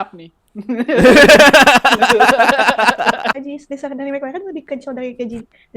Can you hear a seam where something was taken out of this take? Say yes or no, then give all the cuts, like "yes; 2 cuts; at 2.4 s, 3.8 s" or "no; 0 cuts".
yes; 1 cut; at 3.4 s